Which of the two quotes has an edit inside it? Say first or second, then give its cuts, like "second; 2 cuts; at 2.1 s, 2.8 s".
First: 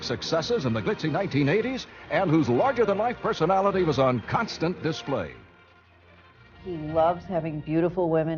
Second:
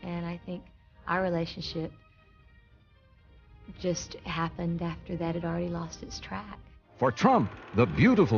first; 1 cut; at 6.7 s